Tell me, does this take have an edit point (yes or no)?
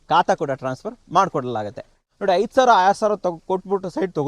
yes